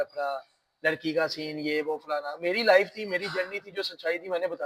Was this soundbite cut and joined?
no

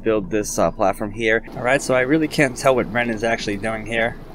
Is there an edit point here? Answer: yes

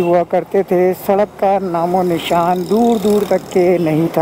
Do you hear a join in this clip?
no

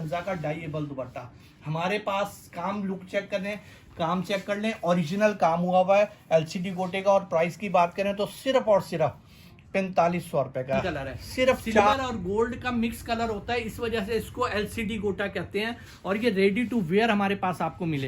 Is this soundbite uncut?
no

